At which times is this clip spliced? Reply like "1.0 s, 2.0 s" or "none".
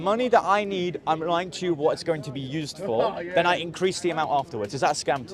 none